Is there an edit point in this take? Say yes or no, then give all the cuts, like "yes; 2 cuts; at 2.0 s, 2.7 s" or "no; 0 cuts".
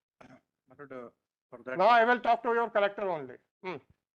no; 0 cuts